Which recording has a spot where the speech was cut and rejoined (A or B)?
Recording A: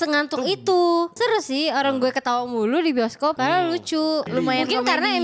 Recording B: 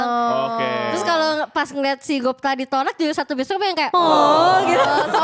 A